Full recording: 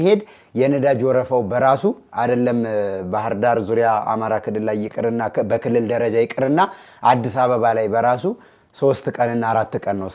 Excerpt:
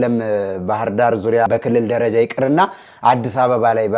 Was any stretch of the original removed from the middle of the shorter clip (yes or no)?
yes